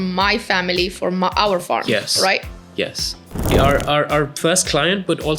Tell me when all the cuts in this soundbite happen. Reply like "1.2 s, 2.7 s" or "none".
3.5 s